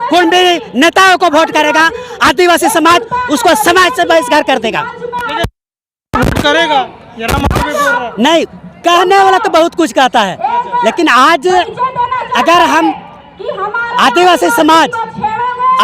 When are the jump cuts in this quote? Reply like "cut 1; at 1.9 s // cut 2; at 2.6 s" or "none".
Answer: none